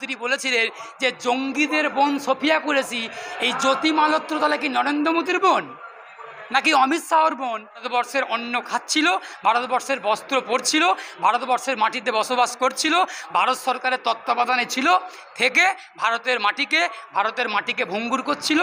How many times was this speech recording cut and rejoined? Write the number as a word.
one